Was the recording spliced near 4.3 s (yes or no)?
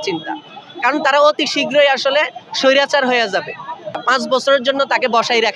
yes